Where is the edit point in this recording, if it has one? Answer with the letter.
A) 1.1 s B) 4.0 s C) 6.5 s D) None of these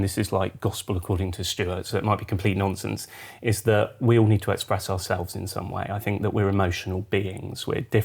D